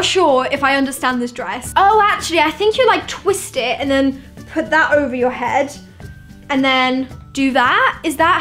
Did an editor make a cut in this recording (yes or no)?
no